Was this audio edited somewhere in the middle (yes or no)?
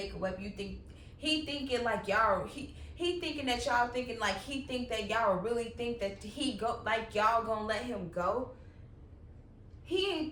no